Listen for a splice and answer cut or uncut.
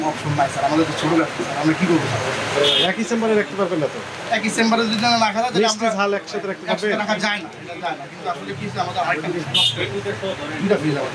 uncut